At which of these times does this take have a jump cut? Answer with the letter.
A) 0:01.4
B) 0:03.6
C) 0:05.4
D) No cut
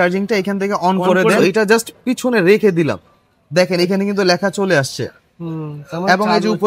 A